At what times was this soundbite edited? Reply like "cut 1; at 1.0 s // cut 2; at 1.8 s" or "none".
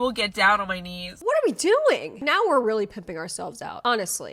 cut 1; at 1.1 s // cut 2; at 2.1 s